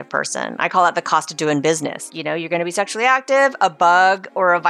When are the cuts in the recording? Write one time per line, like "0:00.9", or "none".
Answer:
0:02.1